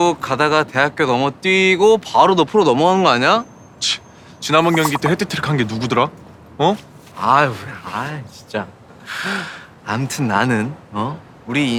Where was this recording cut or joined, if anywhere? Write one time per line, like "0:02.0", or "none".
none